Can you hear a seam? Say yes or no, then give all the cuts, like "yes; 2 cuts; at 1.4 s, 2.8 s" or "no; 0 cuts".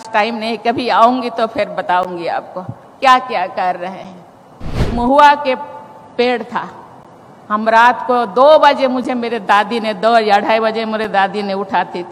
yes; 1 cut; at 4.7 s